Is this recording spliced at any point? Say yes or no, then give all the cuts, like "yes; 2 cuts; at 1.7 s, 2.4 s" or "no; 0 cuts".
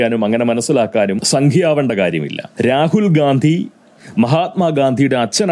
yes; 2 cuts; at 1.2 s, 2.4 s